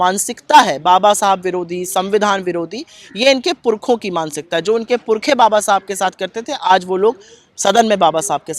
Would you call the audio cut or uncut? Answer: uncut